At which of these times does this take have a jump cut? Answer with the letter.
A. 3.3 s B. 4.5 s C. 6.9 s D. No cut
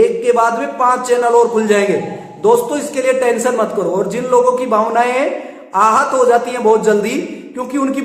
D